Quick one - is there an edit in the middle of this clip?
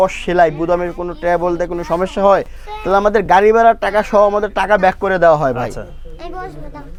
no; 0 cuts

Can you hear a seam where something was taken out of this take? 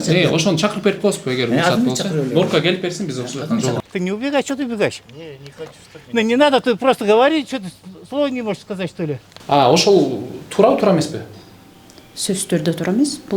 yes; 2 cuts; at 3.8 s, 9.3 s

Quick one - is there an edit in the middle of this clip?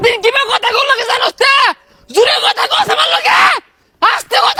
no; 0 cuts

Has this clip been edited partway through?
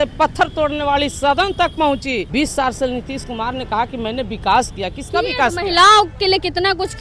yes; 1 cut; at 2.3 s

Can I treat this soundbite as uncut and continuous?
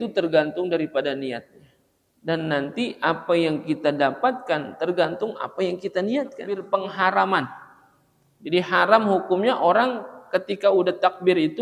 no; 1 cut; at 6.6 s

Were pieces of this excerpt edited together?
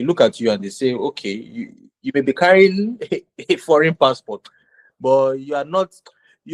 no; 0 cuts

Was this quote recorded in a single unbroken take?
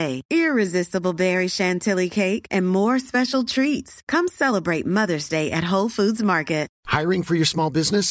no; 1 cut; at 6.8 s

